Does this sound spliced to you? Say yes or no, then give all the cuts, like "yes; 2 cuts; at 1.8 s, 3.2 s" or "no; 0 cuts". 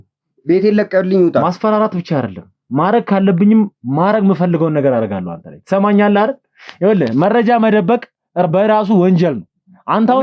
no; 0 cuts